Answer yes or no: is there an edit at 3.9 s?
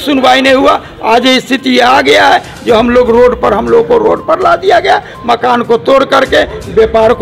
no